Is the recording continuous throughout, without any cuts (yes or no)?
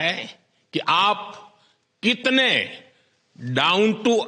yes